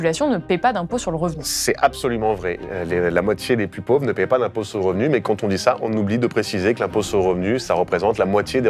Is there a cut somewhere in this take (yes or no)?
no